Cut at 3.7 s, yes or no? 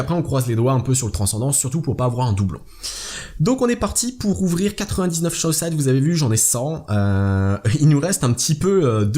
no